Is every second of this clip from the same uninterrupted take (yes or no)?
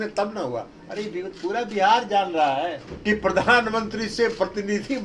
no